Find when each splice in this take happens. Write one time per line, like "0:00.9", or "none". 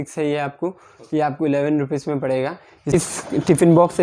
0:02.9